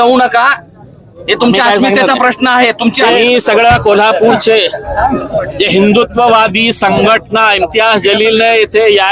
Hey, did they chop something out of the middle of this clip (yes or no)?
yes